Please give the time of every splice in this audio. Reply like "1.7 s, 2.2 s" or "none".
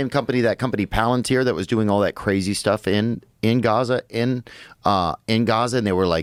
none